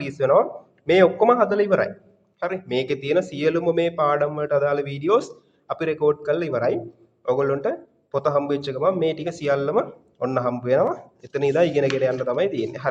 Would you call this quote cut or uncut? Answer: uncut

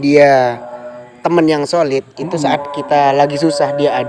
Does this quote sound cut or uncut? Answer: uncut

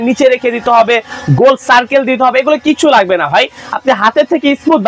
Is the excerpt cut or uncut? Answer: uncut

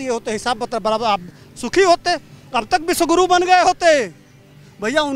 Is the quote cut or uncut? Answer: uncut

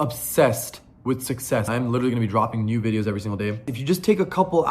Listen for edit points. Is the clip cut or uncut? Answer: cut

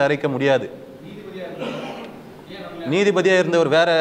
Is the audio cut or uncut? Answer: uncut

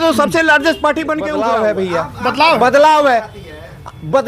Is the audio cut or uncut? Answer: cut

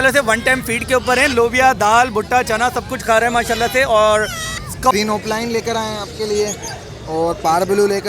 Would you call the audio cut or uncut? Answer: cut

